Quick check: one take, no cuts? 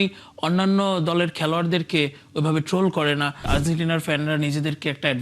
no; 1 cut; at 3.5 s

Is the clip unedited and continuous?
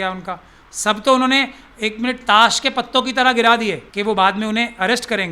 no; 1 cut; at 3.9 s

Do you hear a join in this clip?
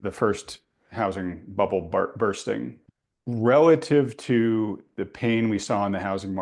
yes; 1 cut; at 2.8 s

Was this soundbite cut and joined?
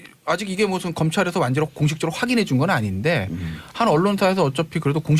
no; 0 cuts

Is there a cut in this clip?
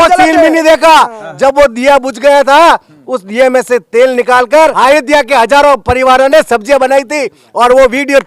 yes; 1 cut; at 4.7 s

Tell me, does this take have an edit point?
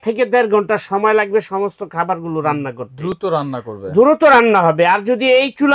no; 0 cuts

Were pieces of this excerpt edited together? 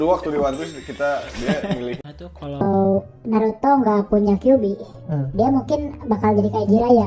yes; 1 cut; at 2.0 s

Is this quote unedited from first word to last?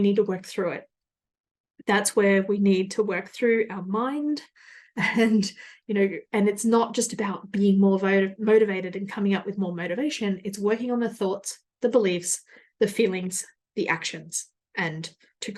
yes; 0 cuts

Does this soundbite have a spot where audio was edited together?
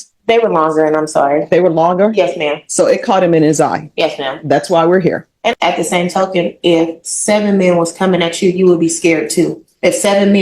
yes; 1 cut; at 5.6 s

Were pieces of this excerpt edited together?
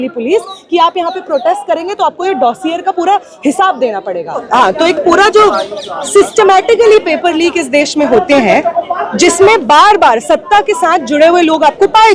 yes; 1 cut; at 4.3 s

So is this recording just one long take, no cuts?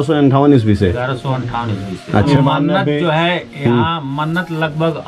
no; 1 cut; at 2.3 s

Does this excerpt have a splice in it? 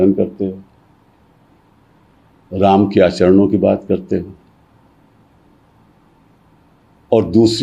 no; 0 cuts

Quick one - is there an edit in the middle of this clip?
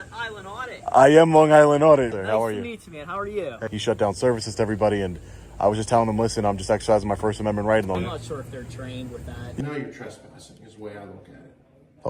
yes; 4 cuts; at 2.1 s, 3.7 s, 8.0 s, 9.6 s

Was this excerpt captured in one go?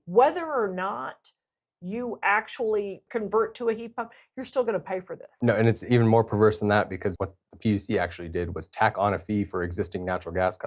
no; 3 cuts; at 3.0 s, 5.3 s, 7.1 s

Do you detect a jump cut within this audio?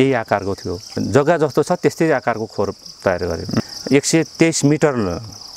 yes; 2 cuts; at 0.9 s, 3.7 s

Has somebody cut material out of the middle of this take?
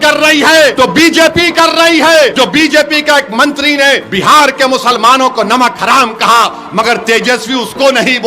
yes; 3 cuts; at 0.7 s, 2.3 s, 4.1 s

